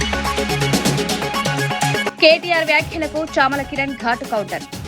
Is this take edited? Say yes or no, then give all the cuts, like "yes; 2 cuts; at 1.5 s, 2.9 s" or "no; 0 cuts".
yes; 1 cut; at 2.1 s